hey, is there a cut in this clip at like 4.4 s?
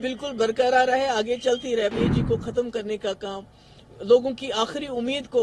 no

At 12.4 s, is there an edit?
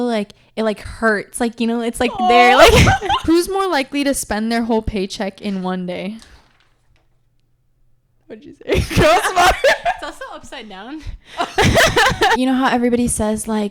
yes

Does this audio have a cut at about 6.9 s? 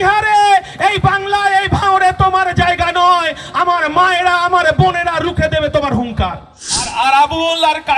yes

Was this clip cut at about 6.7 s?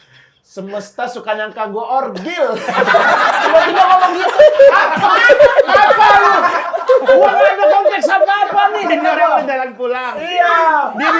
no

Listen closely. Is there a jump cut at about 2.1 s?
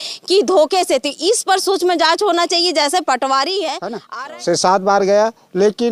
no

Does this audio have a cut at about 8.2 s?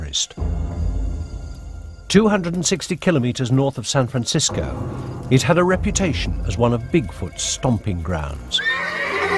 no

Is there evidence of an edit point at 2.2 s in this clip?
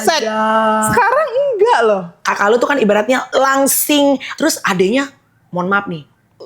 yes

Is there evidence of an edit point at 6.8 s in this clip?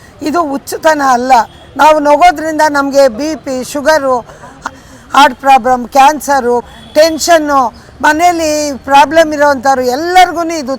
yes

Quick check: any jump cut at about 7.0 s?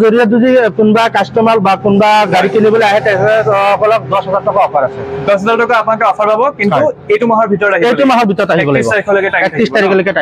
no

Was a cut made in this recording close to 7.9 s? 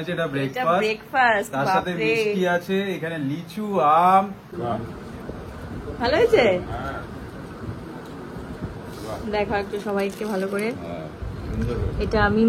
no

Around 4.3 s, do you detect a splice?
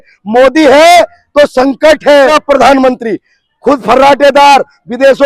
no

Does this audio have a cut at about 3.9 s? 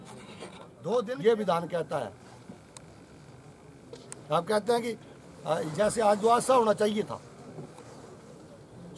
no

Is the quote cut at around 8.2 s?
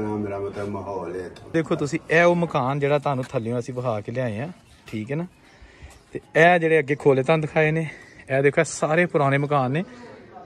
no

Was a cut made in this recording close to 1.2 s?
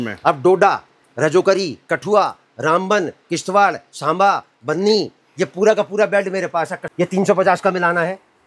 no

